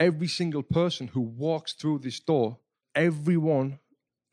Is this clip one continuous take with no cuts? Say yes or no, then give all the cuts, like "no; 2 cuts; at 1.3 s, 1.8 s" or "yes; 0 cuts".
no; 1 cut; at 2.8 s